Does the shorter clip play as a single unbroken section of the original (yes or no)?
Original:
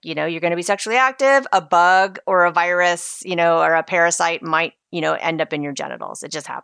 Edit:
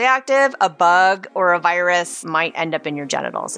no